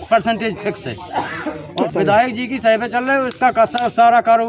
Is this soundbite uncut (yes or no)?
no